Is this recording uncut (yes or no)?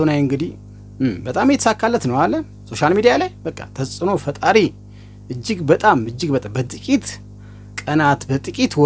yes